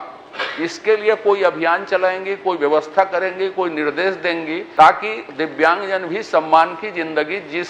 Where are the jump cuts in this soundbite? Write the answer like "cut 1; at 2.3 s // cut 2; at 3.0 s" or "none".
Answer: cut 1; at 4.6 s